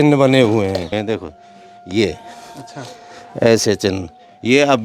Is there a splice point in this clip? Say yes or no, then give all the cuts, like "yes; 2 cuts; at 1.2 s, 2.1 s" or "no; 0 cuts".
yes; 1 cut; at 1.0 s